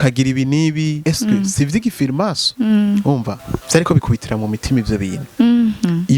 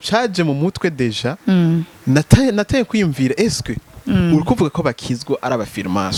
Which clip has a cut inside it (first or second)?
first